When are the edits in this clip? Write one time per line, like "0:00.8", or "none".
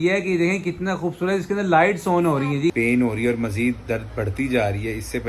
0:02.7